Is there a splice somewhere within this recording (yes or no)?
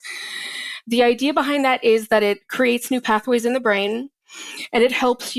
no